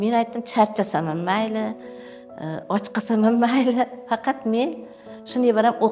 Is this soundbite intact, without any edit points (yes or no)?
yes